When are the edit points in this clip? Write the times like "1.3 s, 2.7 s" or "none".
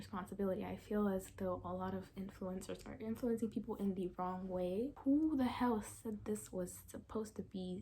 4.9 s